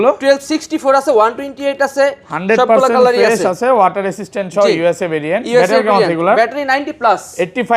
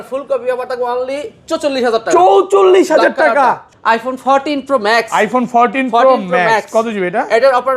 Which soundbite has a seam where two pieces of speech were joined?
second; 1 cut; at 3.7 s

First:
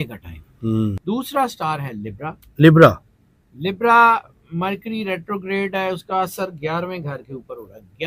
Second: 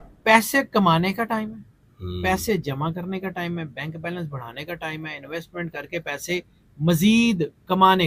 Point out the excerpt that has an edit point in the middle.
first; 1 cut; at 1.0 s

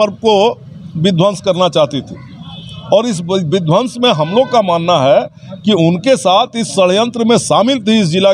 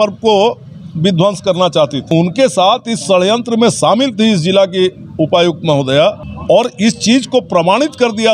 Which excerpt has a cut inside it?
second; 2 cuts; at 2.1 s, 6.3 s

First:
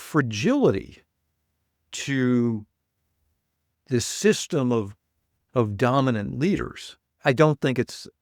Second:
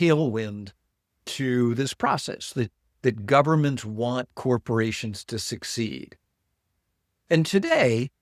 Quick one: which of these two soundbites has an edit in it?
first; 1 cut; at 7.2 s

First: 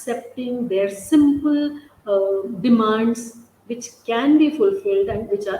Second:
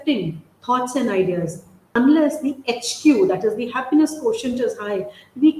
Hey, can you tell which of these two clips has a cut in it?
second; 1 cut; at 2.0 s

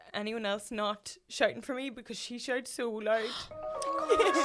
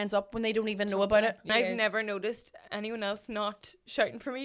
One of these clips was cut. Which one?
second; 1 cut; at 1.5 s

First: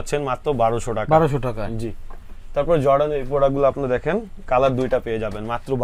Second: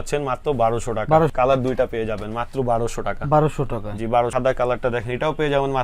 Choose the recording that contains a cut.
second; 2 cuts; at 1.3 s, 4.3 s

